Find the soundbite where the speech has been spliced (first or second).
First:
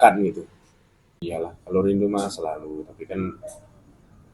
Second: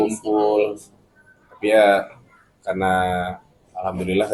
first